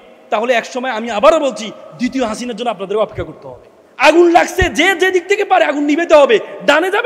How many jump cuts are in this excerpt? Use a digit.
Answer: 1